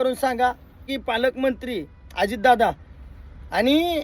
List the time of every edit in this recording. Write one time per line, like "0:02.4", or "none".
0:00.9